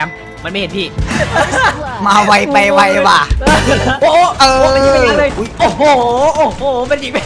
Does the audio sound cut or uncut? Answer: cut